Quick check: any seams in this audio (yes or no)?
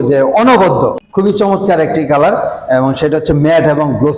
yes